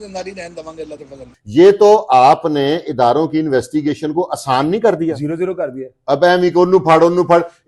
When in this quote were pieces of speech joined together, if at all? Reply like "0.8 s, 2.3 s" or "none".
1.3 s